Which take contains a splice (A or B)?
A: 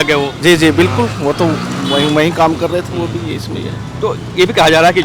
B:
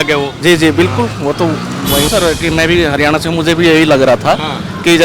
B